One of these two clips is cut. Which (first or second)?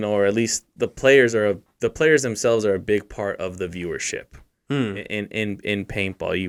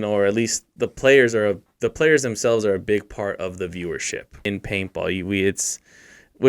second